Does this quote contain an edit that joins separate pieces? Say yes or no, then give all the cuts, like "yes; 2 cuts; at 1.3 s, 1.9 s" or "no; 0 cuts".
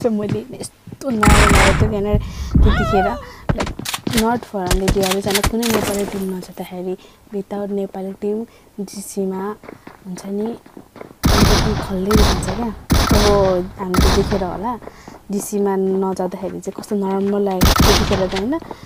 no; 0 cuts